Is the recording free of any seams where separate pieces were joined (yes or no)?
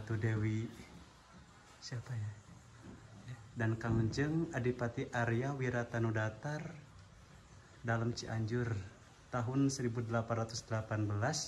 yes